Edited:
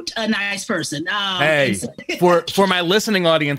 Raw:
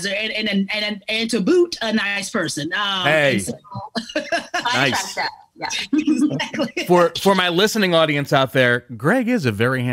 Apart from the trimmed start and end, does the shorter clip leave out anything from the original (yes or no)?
yes